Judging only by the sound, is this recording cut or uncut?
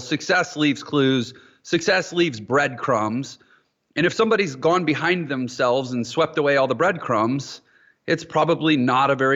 uncut